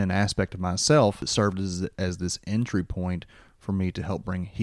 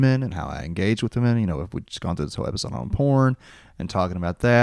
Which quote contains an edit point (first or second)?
first